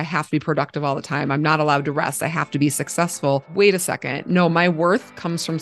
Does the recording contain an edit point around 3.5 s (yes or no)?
yes